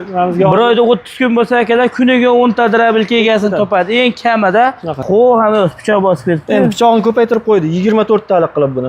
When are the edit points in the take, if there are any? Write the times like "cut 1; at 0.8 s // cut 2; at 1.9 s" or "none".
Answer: cut 1; at 5.0 s